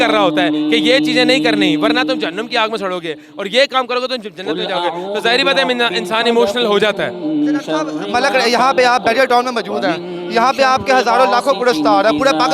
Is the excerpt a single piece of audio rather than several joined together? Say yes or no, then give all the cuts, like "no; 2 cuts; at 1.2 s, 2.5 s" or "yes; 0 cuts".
yes; 0 cuts